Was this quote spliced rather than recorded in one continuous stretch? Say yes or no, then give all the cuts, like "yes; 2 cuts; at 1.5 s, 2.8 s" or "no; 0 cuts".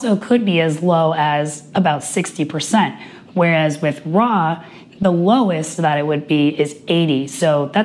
no; 0 cuts